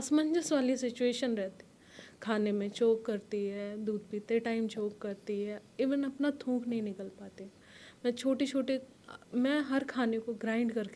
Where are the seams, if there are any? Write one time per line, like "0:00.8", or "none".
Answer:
none